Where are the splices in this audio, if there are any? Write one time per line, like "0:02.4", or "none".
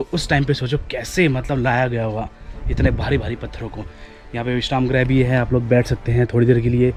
none